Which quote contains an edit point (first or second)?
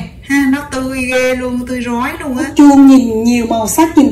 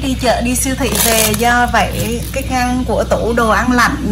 first